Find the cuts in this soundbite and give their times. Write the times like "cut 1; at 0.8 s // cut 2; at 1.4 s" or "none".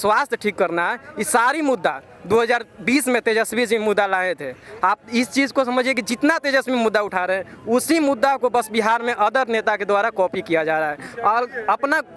none

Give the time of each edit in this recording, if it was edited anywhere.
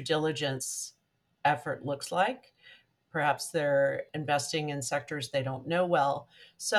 cut 1; at 4.1 s

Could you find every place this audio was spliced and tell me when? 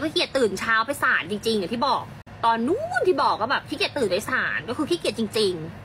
none

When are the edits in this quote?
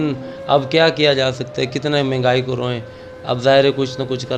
none

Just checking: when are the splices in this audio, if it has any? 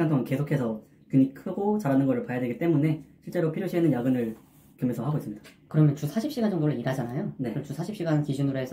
none

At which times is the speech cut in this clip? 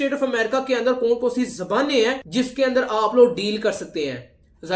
none

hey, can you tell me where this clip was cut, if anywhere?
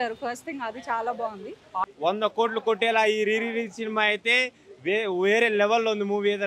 cut 1; at 1.9 s

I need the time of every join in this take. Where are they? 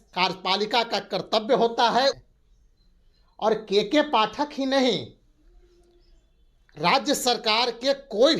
cut 1; at 2.2 s

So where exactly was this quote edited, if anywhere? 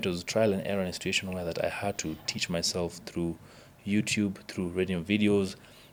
none

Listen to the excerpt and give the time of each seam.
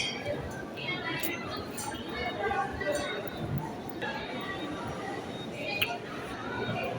cut 1; at 4.0 s

